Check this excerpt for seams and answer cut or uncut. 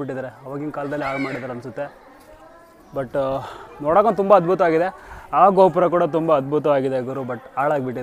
uncut